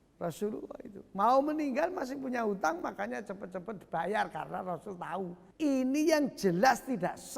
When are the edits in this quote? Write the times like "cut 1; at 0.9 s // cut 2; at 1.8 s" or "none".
cut 1; at 5.4 s